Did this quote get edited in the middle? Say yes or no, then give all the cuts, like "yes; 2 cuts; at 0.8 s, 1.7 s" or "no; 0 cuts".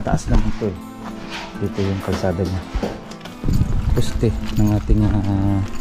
yes; 1 cut; at 3.4 s